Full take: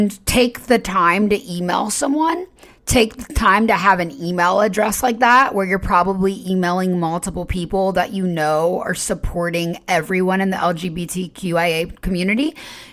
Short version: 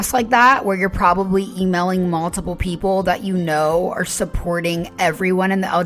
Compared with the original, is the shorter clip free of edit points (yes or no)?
yes